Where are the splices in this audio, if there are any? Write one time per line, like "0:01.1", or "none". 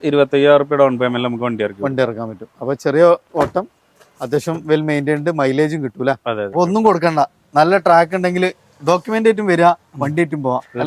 0:06.5